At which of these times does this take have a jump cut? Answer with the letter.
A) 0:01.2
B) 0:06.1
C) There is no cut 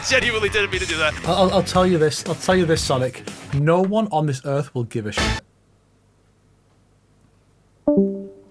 A